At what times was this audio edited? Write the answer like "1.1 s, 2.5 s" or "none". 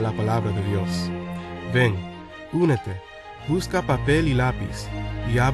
3.6 s